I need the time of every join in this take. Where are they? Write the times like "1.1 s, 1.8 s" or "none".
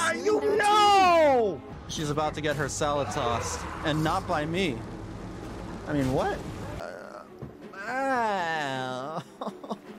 1.8 s, 6.7 s